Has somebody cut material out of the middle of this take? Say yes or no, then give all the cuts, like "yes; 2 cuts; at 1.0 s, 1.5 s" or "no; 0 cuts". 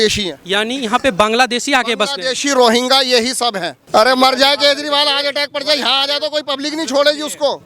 yes; 1 cut; at 3.7 s